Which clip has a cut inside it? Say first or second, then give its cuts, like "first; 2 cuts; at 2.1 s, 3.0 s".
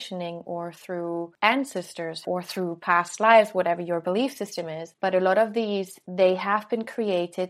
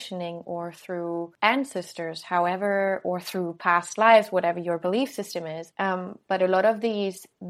first; 3 cuts; at 2.2 s, 4.9 s, 6.0 s